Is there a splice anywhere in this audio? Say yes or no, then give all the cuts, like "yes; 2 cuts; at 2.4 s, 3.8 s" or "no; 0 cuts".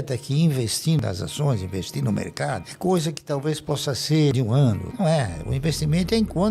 yes; 2 cuts; at 1.0 s, 4.7 s